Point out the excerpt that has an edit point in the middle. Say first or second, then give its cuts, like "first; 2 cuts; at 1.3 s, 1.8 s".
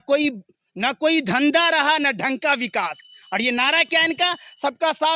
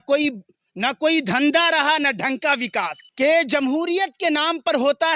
second; 1 cut; at 3.0 s